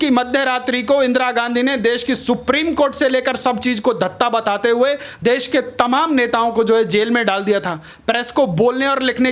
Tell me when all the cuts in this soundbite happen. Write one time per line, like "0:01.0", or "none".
none